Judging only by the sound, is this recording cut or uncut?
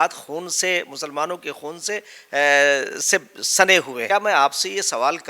cut